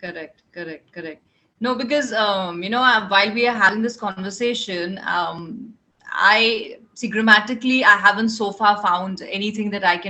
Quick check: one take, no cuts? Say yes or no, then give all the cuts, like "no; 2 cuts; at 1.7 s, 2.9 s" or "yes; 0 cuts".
yes; 0 cuts